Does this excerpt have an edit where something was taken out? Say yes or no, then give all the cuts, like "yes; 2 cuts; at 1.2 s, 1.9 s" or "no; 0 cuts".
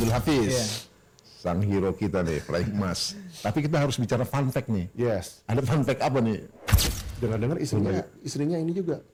no; 0 cuts